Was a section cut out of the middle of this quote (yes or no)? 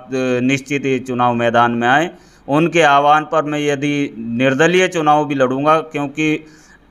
no